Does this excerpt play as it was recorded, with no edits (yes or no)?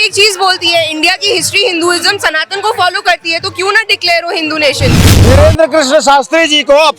no